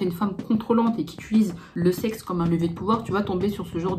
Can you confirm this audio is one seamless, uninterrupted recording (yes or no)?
no